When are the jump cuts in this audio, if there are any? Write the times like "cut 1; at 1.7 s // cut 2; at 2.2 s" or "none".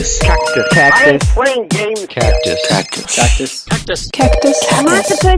none